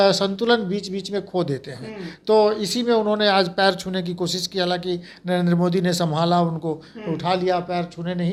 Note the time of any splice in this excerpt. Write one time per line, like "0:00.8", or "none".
none